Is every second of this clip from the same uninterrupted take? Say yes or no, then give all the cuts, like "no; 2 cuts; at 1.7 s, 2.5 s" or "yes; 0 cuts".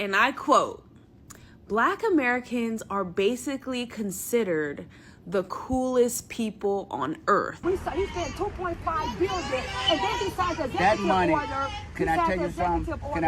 no; 1 cut; at 7.5 s